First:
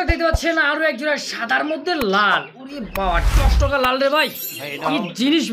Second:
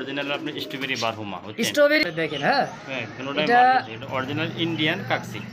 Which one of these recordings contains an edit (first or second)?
second